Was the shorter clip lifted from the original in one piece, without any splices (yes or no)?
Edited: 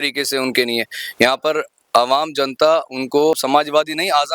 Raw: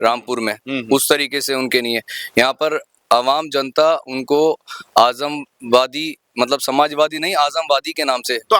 no